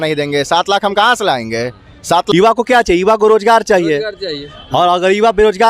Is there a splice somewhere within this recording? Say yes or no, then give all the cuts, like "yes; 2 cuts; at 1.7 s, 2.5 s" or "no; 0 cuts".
yes; 1 cut; at 2.3 s